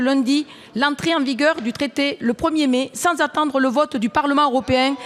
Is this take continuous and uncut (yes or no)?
yes